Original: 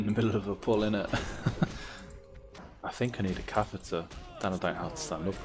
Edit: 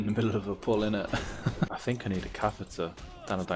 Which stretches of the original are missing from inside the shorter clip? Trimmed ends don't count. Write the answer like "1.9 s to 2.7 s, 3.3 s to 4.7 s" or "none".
1.7 s to 2.8 s